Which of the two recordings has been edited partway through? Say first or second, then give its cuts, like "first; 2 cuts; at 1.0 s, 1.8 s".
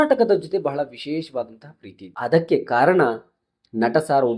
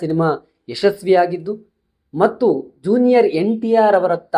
first; 1 cut; at 2.1 s